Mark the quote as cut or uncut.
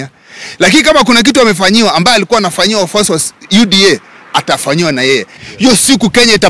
cut